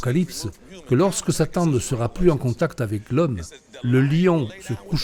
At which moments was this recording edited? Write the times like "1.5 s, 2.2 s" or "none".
none